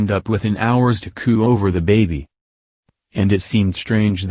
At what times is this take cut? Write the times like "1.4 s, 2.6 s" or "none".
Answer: 2.4 s